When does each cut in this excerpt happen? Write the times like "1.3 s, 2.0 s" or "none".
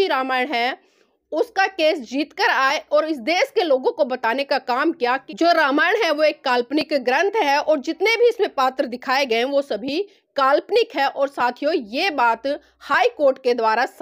5.3 s